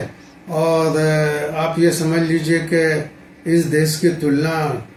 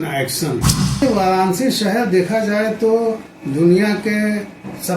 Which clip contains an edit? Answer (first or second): second